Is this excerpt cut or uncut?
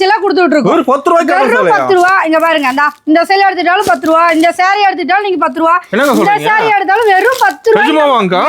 uncut